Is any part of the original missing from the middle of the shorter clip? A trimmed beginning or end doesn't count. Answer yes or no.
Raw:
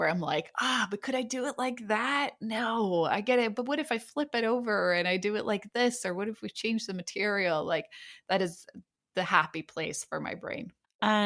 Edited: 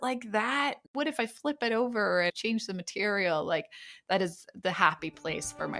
yes